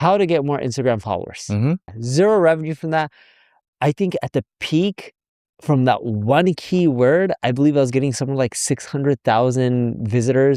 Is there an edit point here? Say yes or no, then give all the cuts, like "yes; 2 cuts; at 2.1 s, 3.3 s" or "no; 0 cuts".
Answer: yes; 1 cut; at 2.0 s